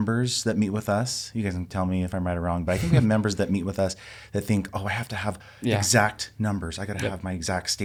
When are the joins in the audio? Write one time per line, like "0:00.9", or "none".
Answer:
none